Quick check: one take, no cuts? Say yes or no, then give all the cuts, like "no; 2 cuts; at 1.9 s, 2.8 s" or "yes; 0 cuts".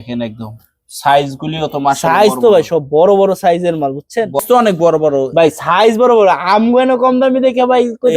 no; 1 cut; at 4.4 s